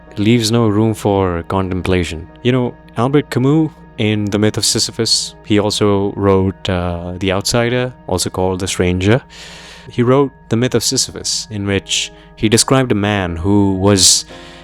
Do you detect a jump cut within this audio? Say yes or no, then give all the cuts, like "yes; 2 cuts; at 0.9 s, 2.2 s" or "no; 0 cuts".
yes; 1 cut; at 9.8 s